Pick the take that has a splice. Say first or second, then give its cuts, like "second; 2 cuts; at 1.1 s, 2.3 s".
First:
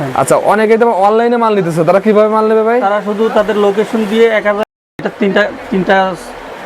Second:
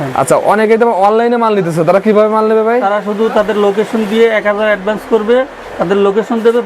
first; 1 cut; at 5.0 s